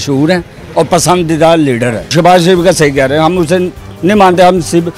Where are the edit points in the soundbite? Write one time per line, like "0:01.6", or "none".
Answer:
0:02.1